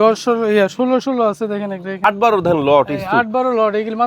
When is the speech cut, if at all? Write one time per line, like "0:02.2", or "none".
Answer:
0:02.1